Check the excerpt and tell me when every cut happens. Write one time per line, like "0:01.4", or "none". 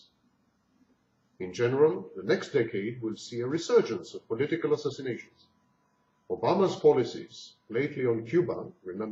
none